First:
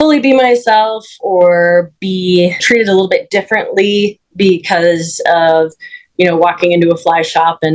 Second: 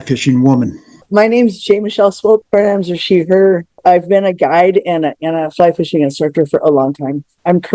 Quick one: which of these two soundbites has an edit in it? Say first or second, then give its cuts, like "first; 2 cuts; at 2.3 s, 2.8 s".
second; 3 cuts; at 1.0 s, 2.5 s, 3.7 s